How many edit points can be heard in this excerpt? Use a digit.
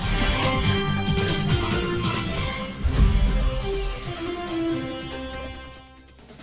2